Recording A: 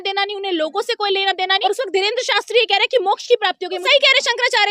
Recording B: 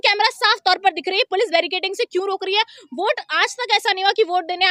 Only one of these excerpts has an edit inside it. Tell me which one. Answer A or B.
A